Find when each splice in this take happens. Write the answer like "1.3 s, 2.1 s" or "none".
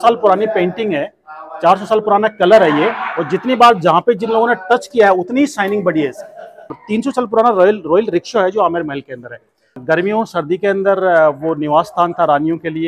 6.7 s, 9.8 s